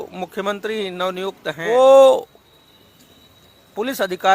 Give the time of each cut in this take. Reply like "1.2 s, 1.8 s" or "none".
1.7 s